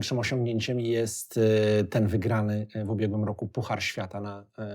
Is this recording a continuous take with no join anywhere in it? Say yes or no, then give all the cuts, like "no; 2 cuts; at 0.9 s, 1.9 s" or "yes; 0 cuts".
yes; 0 cuts